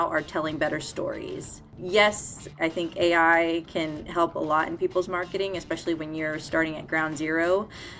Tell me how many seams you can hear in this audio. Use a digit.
2